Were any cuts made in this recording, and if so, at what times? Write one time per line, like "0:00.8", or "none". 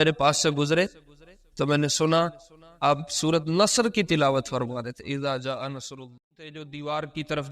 0:06.2